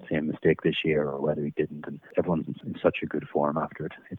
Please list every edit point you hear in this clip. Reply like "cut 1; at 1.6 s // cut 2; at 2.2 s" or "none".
cut 1; at 2.7 s